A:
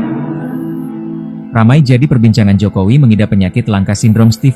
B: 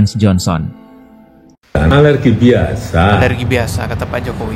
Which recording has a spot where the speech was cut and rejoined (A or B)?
B